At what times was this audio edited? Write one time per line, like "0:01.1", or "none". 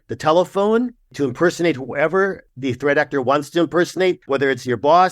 0:02.5
0:04.2